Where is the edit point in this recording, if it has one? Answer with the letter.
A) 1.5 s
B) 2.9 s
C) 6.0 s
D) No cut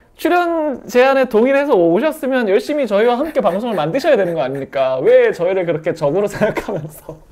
D